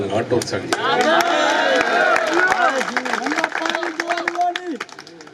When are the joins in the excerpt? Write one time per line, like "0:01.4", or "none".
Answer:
none